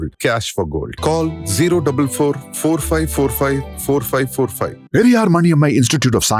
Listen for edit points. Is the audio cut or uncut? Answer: uncut